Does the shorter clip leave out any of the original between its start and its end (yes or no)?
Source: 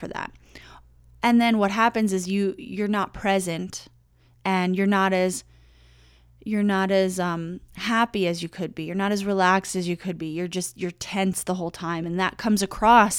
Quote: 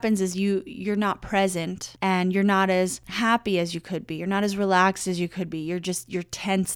yes